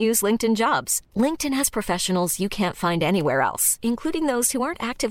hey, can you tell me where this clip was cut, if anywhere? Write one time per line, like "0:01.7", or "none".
none